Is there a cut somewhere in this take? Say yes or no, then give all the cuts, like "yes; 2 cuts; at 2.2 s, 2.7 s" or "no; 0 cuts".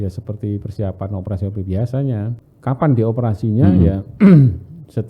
yes; 1 cut; at 2.5 s